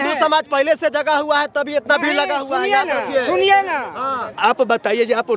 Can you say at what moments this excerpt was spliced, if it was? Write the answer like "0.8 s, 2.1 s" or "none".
4.3 s